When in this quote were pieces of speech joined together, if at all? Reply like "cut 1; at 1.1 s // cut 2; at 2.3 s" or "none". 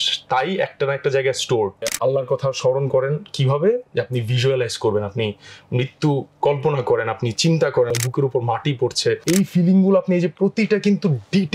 cut 1; at 1.9 s // cut 2; at 7.9 s // cut 3; at 9.2 s